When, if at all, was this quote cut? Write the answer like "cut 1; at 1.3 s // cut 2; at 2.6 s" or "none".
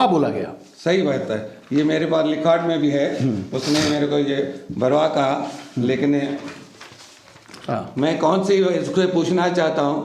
none